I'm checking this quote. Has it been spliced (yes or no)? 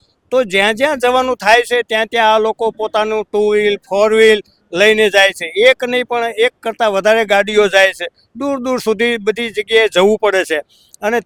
no